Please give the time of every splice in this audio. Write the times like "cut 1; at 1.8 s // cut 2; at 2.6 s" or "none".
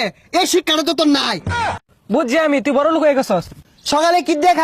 cut 1; at 1.8 s // cut 2; at 3.6 s